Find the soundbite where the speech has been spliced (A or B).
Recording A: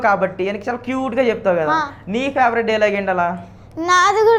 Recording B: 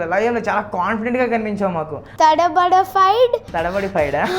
B